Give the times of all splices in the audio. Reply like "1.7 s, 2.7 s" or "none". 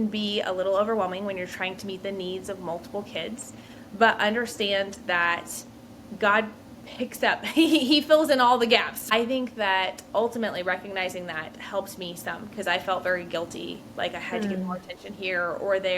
9.0 s